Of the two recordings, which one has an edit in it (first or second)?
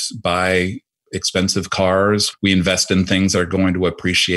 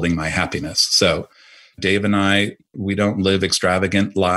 second